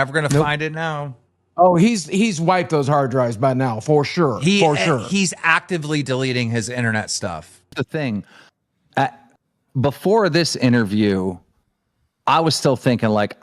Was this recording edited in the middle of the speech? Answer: yes; 1 cut; at 7.6 s

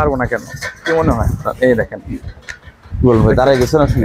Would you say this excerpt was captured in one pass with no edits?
yes; 0 cuts

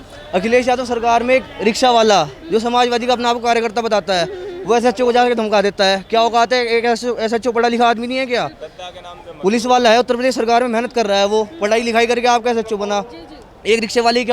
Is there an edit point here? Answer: no; 0 cuts

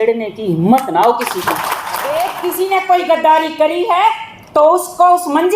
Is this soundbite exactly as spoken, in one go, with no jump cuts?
no; 1 cut; at 2.0 s

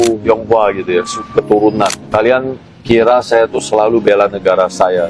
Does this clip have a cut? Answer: no; 0 cuts

